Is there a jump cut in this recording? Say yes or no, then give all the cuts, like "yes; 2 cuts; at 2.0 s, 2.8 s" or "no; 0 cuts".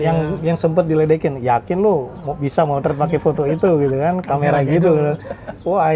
no; 0 cuts